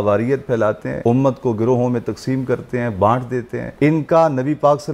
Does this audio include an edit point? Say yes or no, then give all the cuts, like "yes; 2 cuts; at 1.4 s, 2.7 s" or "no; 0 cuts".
yes; 2 cuts; at 0.9 s, 3.6 s